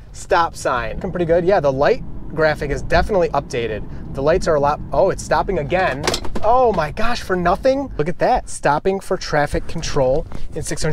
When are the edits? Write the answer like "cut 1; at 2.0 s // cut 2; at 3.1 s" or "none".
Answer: cut 1; at 1.0 s // cut 2; at 8.0 s